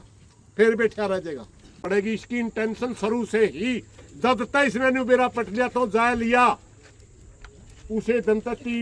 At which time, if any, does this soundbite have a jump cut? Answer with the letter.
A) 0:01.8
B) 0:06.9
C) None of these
A